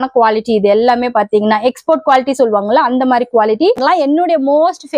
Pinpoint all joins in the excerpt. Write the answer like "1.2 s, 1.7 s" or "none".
3.8 s

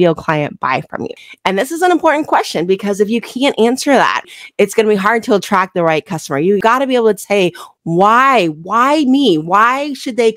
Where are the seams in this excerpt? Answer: 1.0 s, 4.3 s

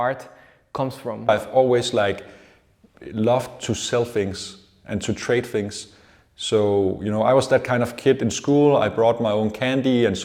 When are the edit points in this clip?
1.3 s

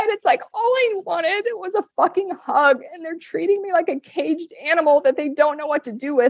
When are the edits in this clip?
none

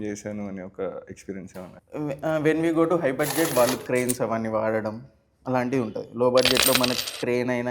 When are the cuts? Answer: 1.8 s

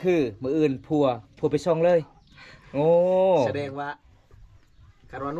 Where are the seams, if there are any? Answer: none

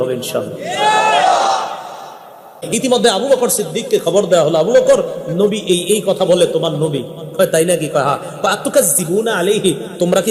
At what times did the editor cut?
2.6 s

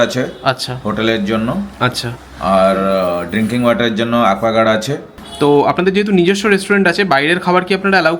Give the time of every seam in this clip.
5.2 s

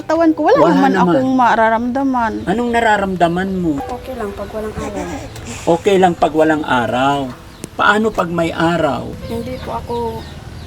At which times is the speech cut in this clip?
2.4 s, 3.8 s, 9.2 s

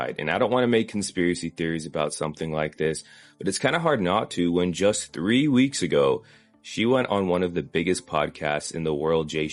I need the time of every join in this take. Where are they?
none

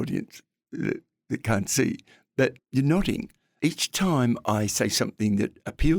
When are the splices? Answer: 2.6 s, 3.4 s

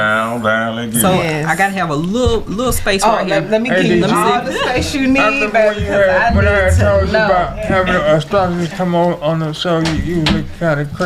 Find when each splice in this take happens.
1.0 s

